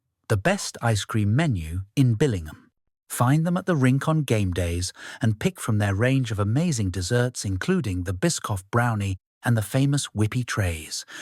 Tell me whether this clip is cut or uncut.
uncut